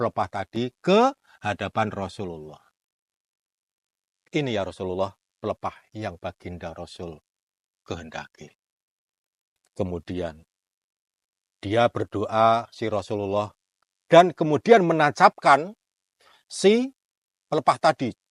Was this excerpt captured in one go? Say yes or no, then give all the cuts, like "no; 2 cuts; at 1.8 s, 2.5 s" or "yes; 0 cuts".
yes; 0 cuts